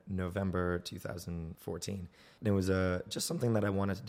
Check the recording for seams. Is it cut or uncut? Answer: cut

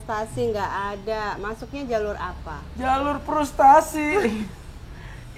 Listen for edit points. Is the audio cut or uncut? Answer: uncut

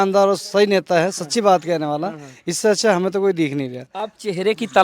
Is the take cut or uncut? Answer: uncut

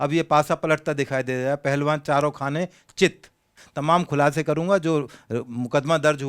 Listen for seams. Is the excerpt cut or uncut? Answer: cut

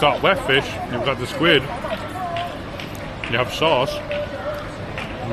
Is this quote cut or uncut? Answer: uncut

